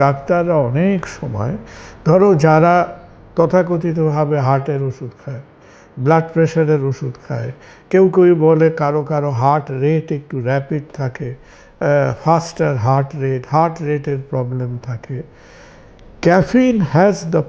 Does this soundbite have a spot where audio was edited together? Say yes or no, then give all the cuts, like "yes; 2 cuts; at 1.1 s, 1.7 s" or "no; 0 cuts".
no; 0 cuts